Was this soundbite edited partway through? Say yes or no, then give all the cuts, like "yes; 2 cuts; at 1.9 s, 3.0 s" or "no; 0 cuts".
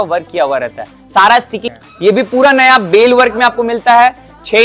yes; 1 cut; at 1.7 s